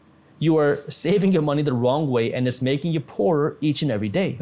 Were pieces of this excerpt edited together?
no; 0 cuts

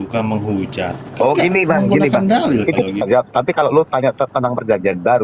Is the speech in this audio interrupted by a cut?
yes; 1 cut; at 3.0 s

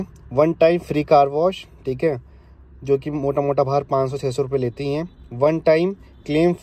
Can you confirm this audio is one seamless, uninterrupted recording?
yes; 0 cuts

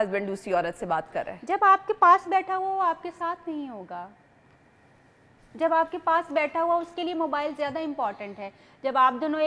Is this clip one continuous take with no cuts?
yes; 0 cuts

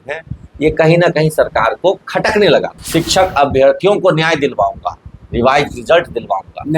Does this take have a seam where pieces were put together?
yes; 1 cut; at 2.8 s

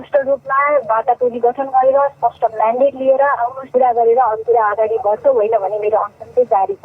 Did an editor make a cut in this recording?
yes; 1 cut; at 3.6 s

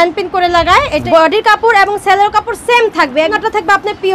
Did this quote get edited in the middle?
yes; 2 cuts; at 1.0 s, 3.4 s

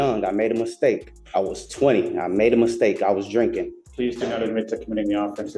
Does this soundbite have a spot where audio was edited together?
yes; 2 cuts; at 1.1 s, 3.8 s

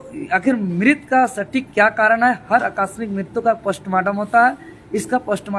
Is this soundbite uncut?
yes; 0 cuts

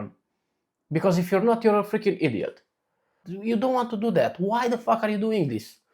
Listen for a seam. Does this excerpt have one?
yes; 1 cut; at 3.3 s

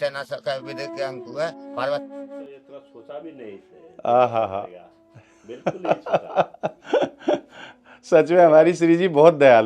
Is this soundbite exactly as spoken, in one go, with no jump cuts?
no; 1 cut; at 2.1 s

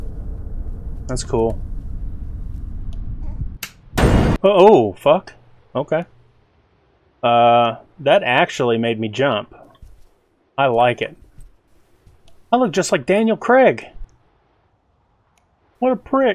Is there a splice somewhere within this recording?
no; 0 cuts

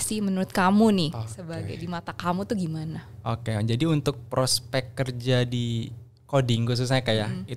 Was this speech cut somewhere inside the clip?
no; 0 cuts

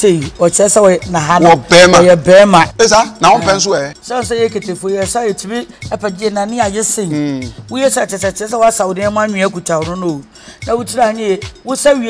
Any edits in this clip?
yes; 2 cuts; at 2.7 s, 4.0 s

